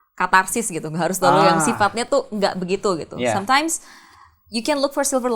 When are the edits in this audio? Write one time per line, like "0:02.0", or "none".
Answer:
none

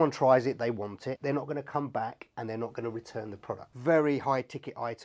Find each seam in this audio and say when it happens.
0:01.2
0:03.7

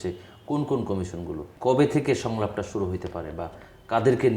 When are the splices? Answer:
0:01.5

